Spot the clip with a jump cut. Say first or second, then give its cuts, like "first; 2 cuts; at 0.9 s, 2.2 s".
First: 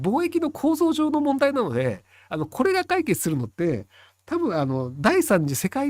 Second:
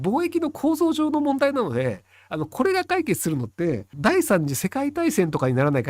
second; 1 cut; at 3.9 s